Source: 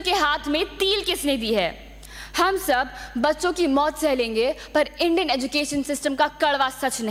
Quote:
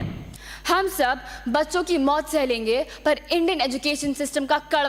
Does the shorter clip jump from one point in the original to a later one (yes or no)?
no